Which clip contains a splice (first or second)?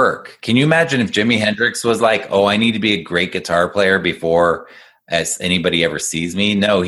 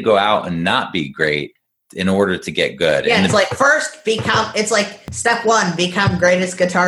second